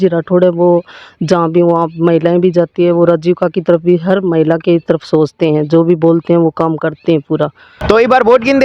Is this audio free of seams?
no; 1 cut; at 7.7 s

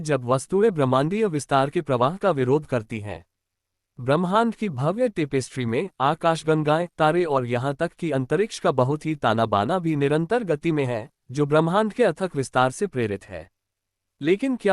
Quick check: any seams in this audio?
yes; 1 cut; at 3.8 s

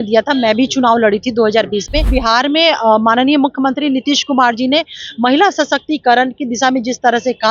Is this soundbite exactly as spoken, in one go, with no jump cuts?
no; 1 cut; at 2.1 s

